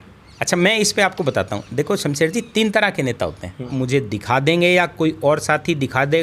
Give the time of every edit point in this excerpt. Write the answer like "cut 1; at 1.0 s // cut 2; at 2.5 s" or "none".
cut 1; at 3.7 s